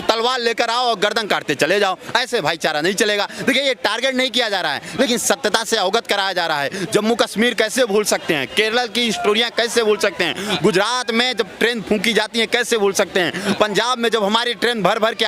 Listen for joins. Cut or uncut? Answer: uncut